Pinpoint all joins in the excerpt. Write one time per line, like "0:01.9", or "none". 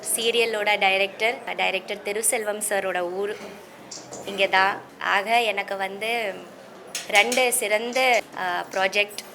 0:01.5
0:04.9
0:08.2